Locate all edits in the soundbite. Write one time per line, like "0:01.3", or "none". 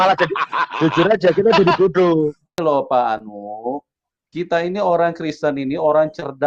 0:02.5